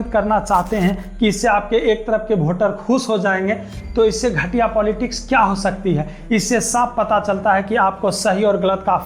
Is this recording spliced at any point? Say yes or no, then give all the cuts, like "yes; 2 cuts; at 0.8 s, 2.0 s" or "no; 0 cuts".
no; 0 cuts